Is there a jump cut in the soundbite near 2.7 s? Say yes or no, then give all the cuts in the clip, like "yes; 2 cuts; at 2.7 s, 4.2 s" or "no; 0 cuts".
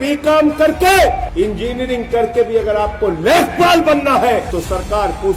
no; 2 cuts; at 1.3 s, 4.5 s